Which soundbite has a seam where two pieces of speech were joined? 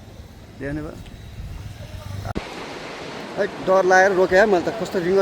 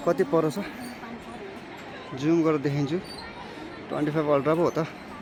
first; 1 cut; at 2.3 s

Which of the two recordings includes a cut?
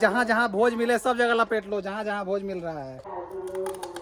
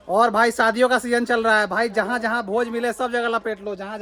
first; 1 cut; at 3.1 s

